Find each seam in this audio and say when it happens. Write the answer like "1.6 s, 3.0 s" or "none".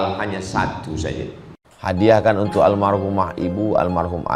1.6 s